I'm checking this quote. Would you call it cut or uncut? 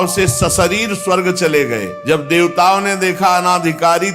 cut